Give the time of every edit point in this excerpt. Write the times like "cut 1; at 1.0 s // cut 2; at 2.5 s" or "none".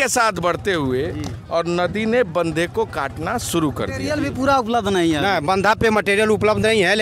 cut 1; at 4.2 s